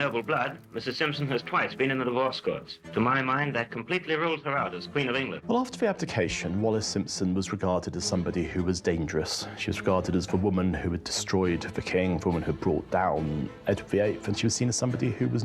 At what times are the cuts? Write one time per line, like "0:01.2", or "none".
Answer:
0:05.4
0:13.5